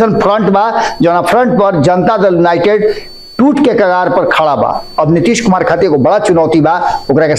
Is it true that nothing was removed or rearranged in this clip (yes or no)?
yes